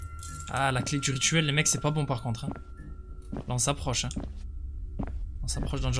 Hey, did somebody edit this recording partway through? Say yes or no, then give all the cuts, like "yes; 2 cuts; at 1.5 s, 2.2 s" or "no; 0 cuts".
no; 0 cuts